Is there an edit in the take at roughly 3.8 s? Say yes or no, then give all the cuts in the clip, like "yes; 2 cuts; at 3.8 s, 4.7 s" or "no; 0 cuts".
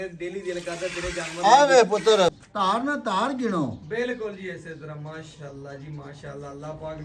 no; 1 cut; at 2.4 s